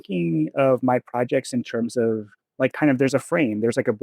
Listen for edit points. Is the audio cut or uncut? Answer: cut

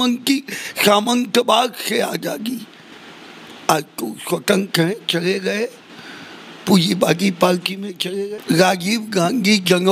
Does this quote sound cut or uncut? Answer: cut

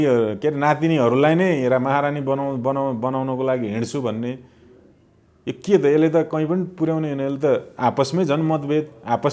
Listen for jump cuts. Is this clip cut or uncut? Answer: uncut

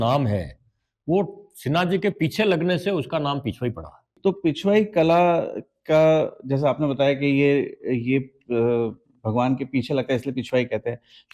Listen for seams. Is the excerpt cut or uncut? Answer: uncut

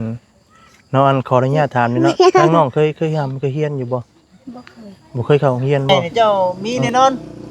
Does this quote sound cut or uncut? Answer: cut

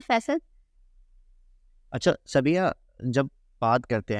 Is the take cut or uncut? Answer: uncut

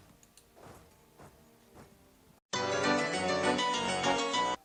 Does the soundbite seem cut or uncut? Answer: uncut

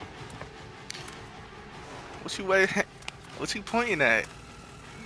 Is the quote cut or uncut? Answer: uncut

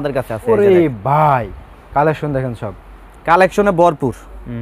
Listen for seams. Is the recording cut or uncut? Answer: uncut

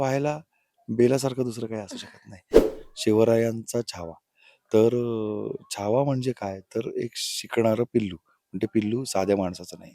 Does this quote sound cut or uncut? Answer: cut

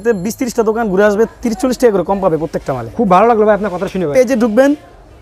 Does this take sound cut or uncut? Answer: cut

